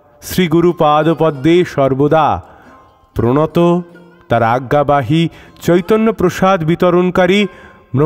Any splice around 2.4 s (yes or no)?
no